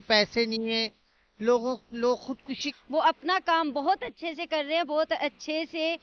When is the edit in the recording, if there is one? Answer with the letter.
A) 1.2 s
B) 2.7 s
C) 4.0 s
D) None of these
B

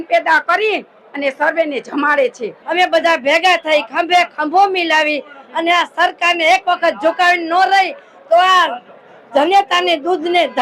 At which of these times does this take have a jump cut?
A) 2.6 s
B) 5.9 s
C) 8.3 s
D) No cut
A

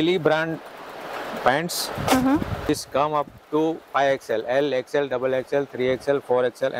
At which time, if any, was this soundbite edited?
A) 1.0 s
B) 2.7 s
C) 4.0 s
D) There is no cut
B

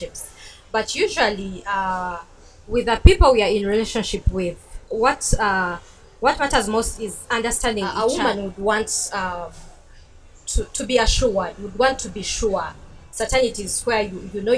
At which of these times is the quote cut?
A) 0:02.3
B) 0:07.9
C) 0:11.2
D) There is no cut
B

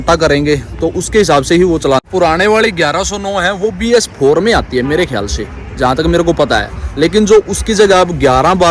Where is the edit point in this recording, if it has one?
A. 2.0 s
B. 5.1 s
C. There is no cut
A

